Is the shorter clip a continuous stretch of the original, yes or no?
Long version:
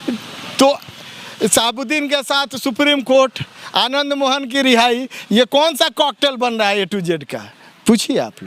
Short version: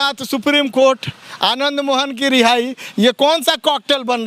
yes